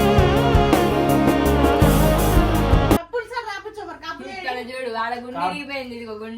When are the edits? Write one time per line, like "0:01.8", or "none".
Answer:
0:03.1